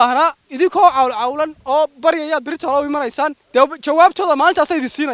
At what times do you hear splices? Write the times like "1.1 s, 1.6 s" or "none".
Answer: none

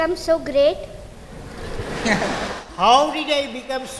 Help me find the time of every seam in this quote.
none

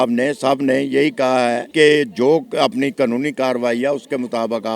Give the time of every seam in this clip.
1.6 s

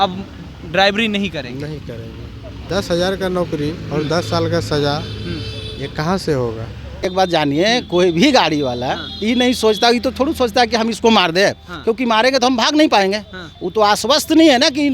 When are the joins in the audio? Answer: 2.6 s, 7.0 s

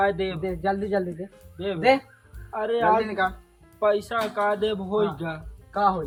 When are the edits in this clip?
none

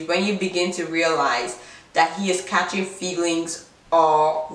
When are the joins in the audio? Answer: none

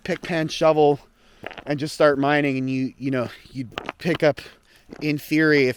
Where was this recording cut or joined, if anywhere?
none

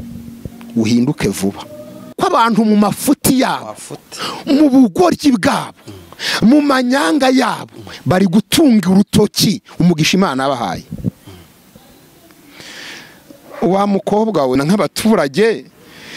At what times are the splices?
2.1 s, 14.6 s

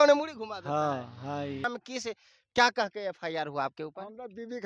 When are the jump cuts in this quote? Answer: 1.6 s

